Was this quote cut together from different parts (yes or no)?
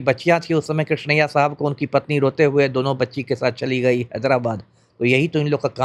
no